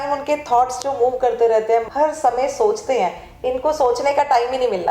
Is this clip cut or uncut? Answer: cut